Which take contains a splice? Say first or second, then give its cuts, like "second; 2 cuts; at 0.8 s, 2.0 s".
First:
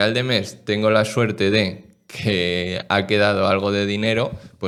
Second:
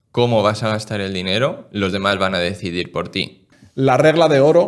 second; 1 cut; at 3.4 s